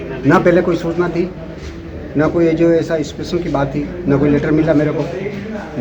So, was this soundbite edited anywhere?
no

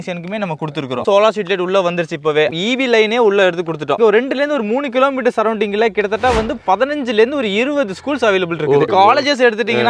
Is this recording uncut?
no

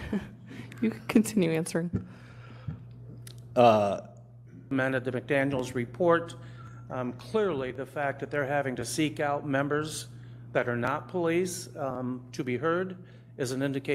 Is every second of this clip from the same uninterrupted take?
no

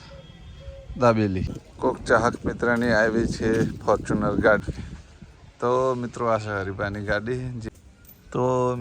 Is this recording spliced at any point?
yes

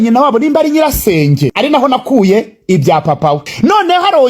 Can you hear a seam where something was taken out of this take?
yes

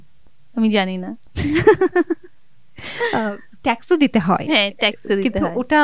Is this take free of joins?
yes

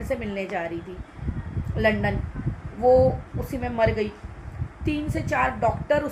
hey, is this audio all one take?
yes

